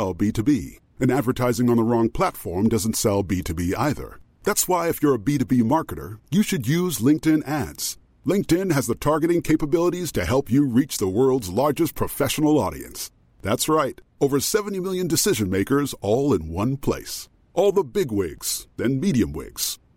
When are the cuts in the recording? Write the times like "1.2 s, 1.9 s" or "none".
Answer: none